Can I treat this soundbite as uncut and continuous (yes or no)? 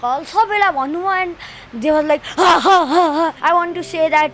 no